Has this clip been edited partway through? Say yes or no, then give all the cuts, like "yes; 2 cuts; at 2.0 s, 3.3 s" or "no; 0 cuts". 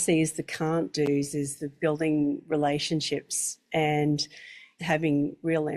yes; 1 cut; at 4.7 s